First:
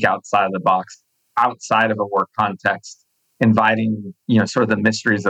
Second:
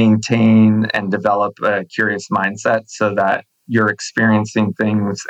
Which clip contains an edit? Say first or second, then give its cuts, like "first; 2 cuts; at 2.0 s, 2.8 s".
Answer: first; 2 cuts; at 1.2 s, 4.1 s